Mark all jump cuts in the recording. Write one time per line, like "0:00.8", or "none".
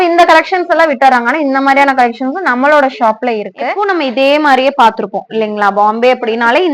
0:03.6